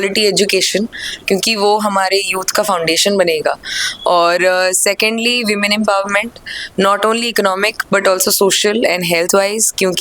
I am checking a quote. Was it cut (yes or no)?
no